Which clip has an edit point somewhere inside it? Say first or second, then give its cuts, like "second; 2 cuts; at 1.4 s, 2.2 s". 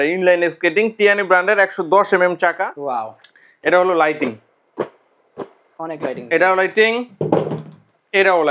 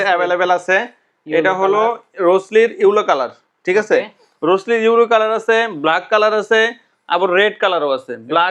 first; 1 cut; at 2.7 s